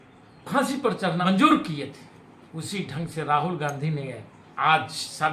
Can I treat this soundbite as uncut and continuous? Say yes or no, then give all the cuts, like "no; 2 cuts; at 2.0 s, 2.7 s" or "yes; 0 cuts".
no; 1 cut; at 1.2 s